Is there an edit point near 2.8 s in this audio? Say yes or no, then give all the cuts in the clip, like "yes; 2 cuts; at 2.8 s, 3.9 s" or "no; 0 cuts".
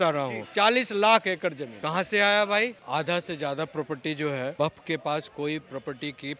yes; 3 cuts; at 1.7 s, 2.8 s, 4.5 s